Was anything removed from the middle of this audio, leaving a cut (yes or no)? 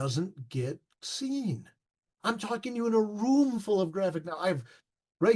no